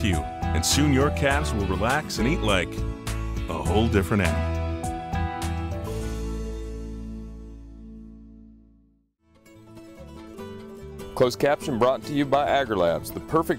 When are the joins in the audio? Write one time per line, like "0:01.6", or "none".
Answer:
0:09.4
0:10.7